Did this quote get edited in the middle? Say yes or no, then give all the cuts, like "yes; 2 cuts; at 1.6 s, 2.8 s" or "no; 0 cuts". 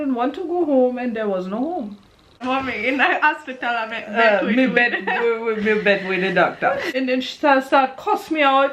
yes; 2 cuts; at 2.4 s, 6.9 s